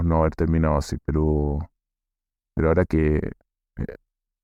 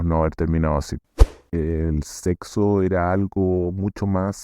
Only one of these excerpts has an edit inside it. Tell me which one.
second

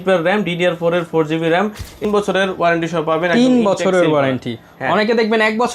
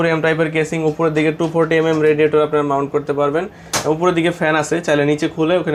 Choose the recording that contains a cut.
first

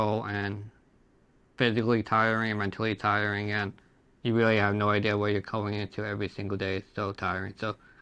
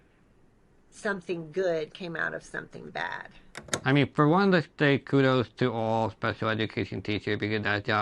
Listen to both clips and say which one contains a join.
second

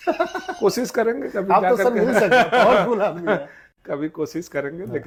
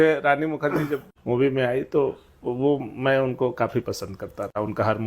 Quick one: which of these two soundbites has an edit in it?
second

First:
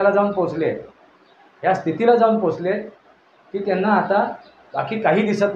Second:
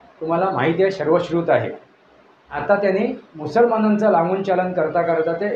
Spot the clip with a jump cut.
second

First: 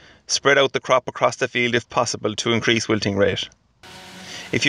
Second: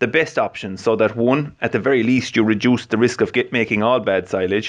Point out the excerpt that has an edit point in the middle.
second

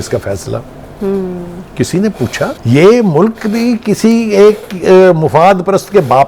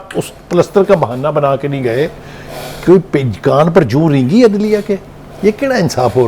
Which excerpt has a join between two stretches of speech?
first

